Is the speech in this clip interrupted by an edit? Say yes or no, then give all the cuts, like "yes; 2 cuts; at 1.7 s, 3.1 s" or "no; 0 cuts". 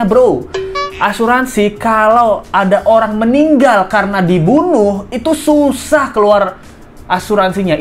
no; 0 cuts